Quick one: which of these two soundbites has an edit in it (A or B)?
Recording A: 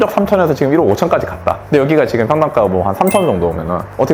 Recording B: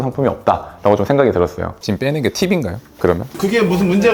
B